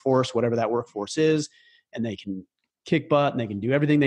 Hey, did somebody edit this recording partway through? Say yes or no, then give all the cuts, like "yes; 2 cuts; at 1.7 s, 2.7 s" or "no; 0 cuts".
no; 0 cuts